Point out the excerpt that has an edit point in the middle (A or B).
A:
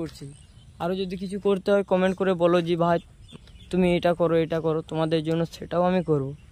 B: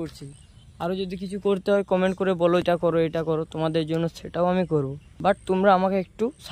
B